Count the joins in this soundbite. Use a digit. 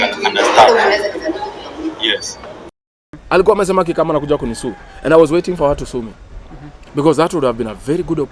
1